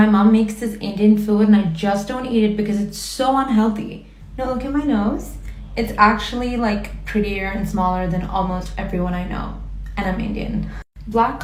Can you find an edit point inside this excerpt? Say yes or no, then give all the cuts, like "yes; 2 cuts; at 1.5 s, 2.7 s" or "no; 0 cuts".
no; 0 cuts